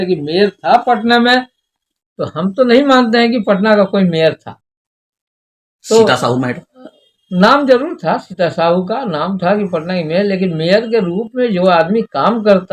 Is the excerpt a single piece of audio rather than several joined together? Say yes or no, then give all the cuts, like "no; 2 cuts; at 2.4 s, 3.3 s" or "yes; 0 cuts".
yes; 0 cuts